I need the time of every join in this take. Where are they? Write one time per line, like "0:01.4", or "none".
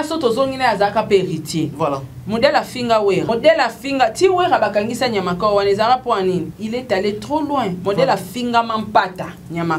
0:01.7
0:03.3
0:06.6